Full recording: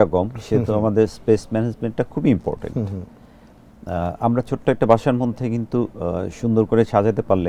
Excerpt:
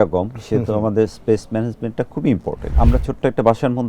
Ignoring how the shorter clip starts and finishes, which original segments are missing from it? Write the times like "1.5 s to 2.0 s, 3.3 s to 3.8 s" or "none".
2.7 s to 4.1 s